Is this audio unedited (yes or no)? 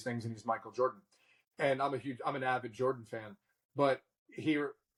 yes